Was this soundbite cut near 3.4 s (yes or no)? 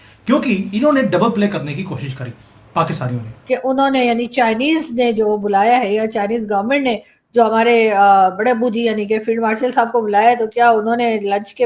yes